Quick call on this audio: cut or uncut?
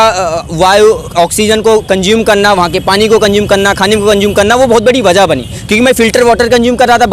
uncut